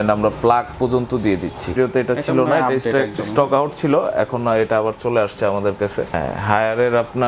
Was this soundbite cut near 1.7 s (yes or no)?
yes